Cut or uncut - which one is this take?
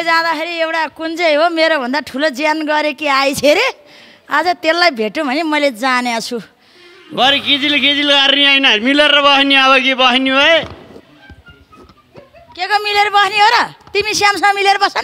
uncut